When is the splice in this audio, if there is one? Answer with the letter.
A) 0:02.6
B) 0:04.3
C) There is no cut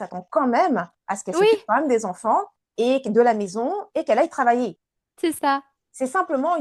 C